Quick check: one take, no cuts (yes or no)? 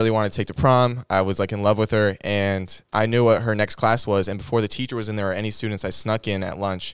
yes